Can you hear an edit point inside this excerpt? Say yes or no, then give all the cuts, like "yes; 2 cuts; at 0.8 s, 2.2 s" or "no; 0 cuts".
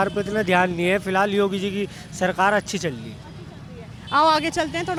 no; 0 cuts